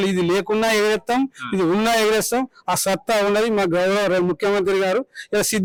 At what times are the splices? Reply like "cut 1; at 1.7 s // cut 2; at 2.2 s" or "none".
none